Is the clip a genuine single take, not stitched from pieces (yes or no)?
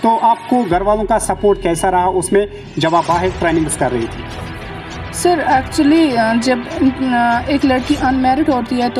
yes